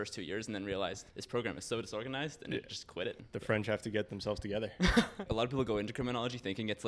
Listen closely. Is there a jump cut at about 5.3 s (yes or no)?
yes